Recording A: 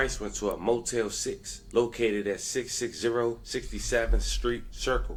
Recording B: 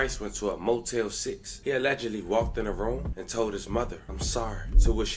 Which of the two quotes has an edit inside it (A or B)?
B